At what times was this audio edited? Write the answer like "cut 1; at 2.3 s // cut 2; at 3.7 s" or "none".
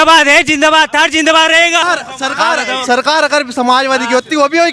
cut 1; at 1.8 s

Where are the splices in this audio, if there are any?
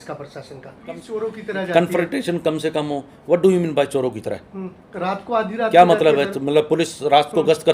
cut 1; at 1.1 s

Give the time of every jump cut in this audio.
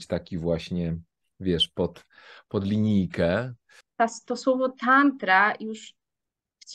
cut 1; at 3.8 s

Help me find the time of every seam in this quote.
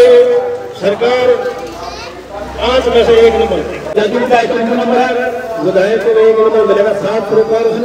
cut 1; at 3.9 s

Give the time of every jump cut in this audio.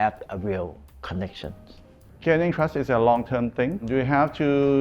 none

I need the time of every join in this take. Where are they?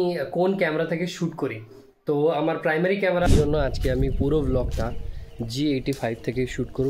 cut 1; at 3.3 s

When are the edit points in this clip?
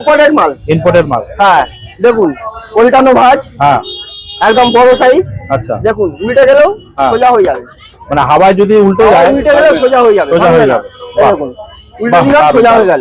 none

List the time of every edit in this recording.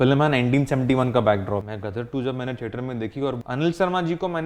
cut 1; at 1.7 s // cut 2; at 3.4 s

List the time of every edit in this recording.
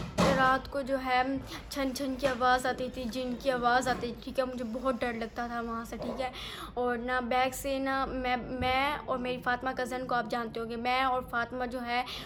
none

